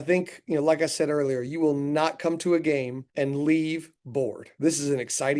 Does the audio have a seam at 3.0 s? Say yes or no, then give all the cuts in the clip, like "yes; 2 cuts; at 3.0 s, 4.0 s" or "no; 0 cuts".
yes; 2 cuts; at 3.0 s, 4.4 s